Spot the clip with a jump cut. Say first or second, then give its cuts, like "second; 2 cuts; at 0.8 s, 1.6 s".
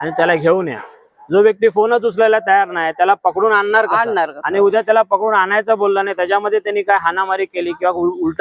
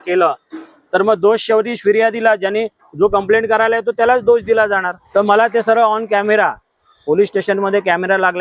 second; 1 cut; at 5.0 s